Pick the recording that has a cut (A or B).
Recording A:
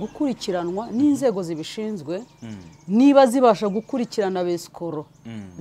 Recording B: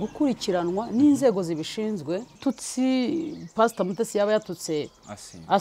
B